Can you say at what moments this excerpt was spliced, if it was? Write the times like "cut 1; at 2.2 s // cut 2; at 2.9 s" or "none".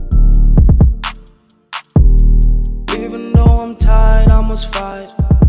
cut 1; at 1.9 s